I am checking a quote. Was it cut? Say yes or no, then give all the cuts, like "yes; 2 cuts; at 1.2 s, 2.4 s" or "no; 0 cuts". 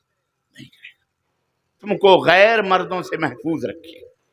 yes; 1 cut; at 1.8 s